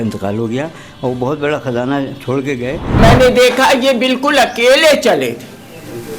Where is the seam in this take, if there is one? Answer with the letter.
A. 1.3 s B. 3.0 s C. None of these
B